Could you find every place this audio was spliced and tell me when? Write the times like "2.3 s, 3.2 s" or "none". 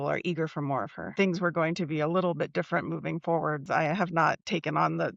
1.1 s, 3.6 s